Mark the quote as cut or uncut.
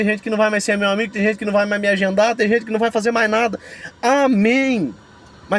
uncut